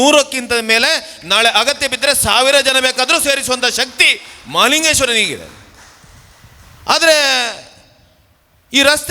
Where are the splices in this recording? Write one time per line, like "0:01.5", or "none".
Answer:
none